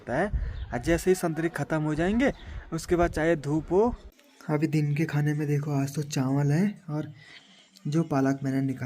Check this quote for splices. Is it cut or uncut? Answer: cut